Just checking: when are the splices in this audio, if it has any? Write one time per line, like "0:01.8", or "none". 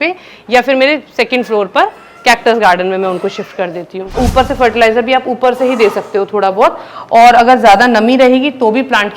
0:04.1

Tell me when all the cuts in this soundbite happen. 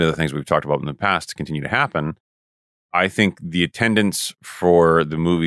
none

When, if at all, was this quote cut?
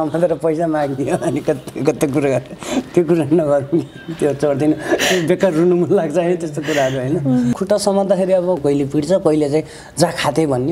0:07.5
0:08.6

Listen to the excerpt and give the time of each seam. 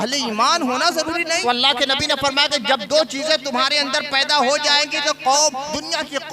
0:01.4

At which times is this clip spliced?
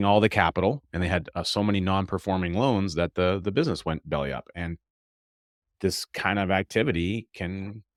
none

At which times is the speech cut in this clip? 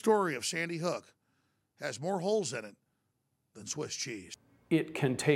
0:04.3

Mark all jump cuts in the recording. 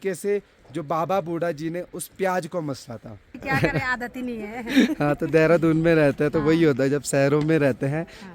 0:03.4

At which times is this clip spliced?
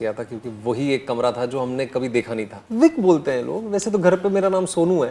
0:02.6

